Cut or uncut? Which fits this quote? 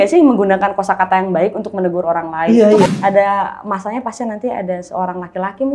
cut